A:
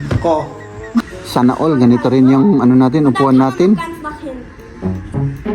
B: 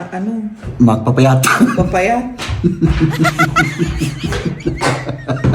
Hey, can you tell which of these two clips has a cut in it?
A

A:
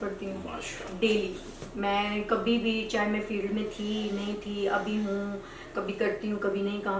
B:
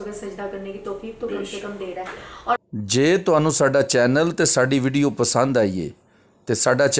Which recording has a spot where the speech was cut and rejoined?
B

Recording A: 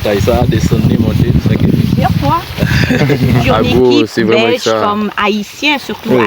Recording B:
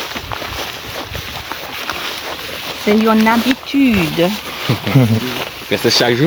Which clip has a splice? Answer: A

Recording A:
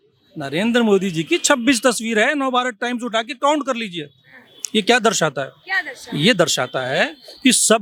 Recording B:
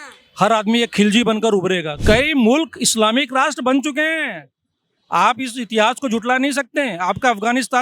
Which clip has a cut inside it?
B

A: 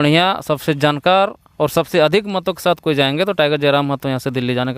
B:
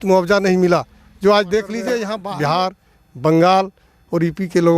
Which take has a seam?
B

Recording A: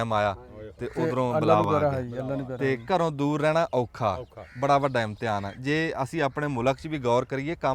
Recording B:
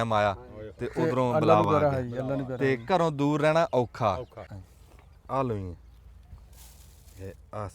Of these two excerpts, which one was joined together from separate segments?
B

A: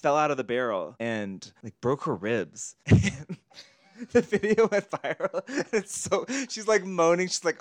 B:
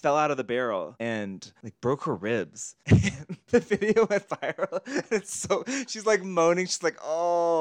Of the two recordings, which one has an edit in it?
B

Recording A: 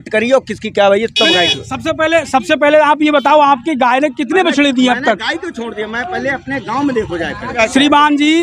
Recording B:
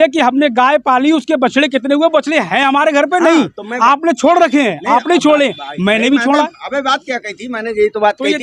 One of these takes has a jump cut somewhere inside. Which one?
A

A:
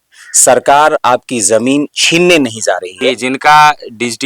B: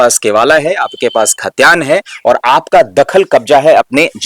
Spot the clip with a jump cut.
A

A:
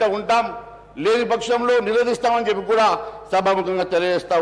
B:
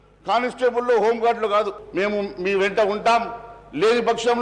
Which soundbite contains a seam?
B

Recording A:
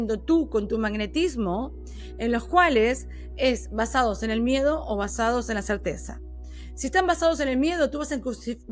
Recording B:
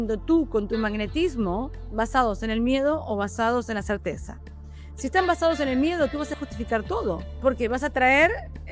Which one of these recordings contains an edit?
B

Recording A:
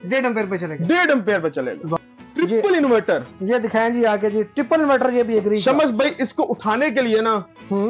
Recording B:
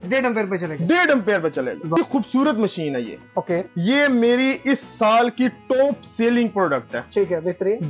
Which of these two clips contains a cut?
B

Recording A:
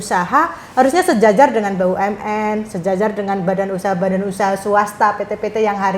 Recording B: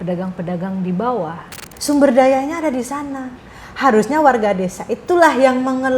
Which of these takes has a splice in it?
B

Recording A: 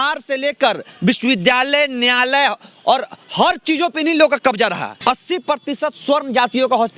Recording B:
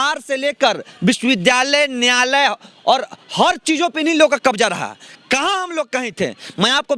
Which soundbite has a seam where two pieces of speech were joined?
A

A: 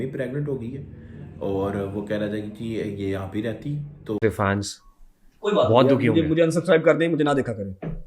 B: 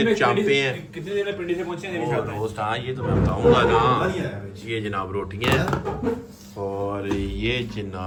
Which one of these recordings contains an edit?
A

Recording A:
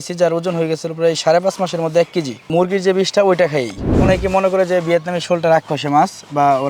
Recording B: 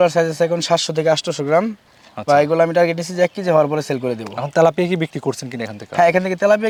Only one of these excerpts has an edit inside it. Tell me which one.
A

